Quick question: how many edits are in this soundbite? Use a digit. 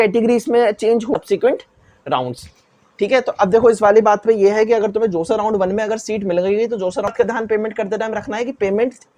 2